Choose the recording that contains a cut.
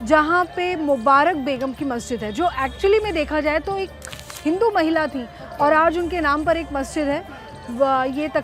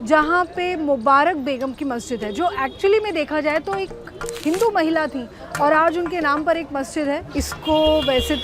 second; 1 cut; at 7.3 s

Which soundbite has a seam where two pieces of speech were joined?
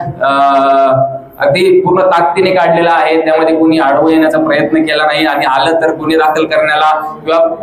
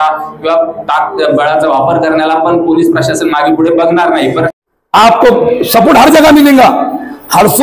second; 1 cut; at 4.5 s

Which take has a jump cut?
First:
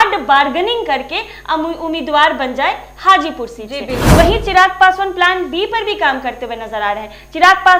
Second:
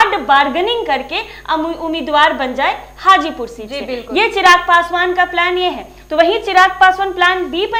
first; 1 cut; at 3.9 s

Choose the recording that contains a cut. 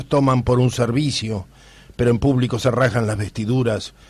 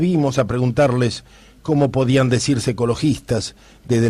first; 1 cut; at 2.9 s

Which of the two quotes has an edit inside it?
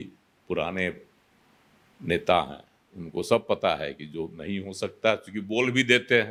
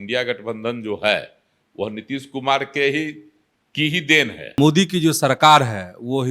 second; 1 cut; at 4.6 s

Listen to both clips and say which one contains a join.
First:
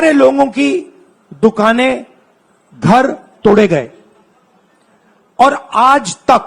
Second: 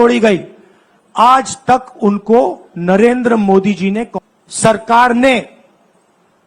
second; 1 cut; at 4.1 s

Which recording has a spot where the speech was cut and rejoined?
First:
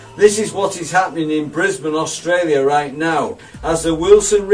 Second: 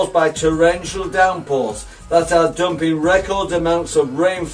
second; 1 cut; at 3.3 s

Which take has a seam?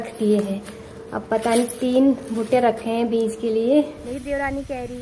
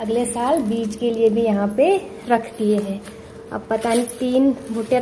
first; 1 cut; at 4.1 s

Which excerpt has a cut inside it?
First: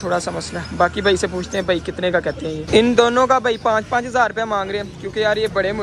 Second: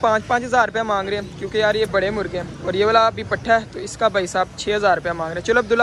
first; 1 cut; at 2.6 s

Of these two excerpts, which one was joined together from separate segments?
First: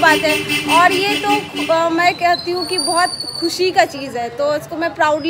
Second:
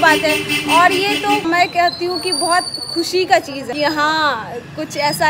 second; 2 cuts; at 1.4 s, 3.6 s

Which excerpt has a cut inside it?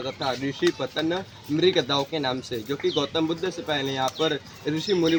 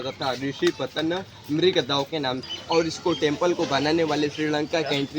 second; 1 cut; at 2.5 s

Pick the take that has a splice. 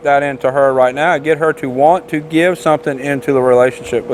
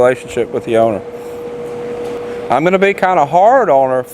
second; 1 cut; at 2.2 s

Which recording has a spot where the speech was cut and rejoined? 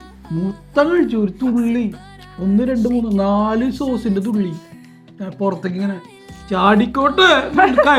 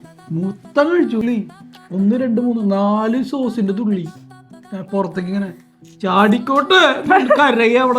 second; 1 cut; at 1.2 s

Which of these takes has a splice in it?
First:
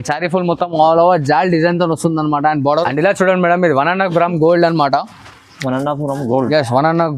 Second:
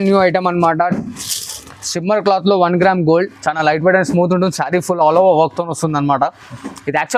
first; 1 cut; at 2.6 s

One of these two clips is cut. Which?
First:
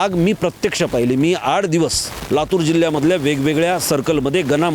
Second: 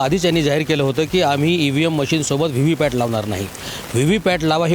first; 1 cut; at 2.1 s

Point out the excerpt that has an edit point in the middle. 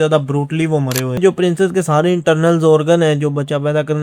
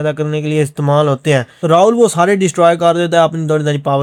first; 1 cut; at 1.2 s

